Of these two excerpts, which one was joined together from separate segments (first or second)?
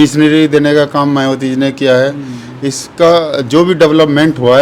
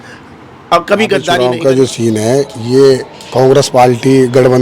second